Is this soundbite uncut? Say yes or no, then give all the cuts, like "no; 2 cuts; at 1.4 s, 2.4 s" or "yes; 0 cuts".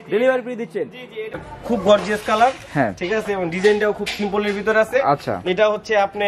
no; 1 cut; at 1.5 s